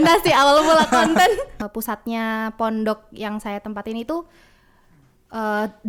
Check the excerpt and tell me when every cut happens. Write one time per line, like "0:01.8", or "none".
0:01.5